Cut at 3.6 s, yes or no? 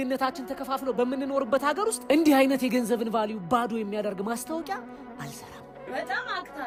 no